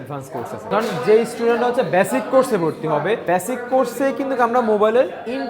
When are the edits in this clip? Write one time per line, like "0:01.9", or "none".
0:00.7
0:03.2

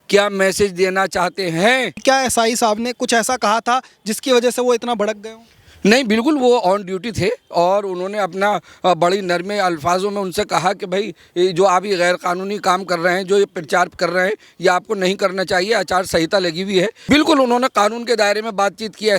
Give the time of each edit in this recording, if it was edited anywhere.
0:02.0
0:17.0

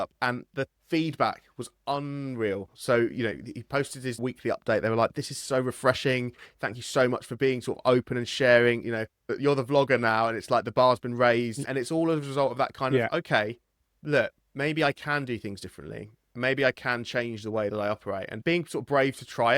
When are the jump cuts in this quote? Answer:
0:18.4

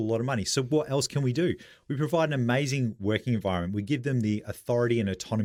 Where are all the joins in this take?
none

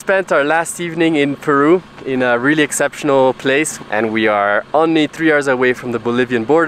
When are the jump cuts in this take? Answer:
0:03.8

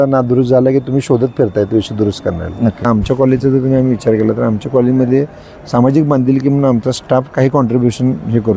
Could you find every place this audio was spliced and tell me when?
0:02.8

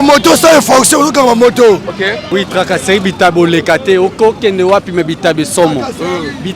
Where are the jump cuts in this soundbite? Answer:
0:02.2

